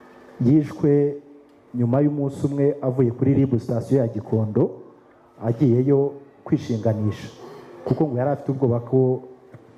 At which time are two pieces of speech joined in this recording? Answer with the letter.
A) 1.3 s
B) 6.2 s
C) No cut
C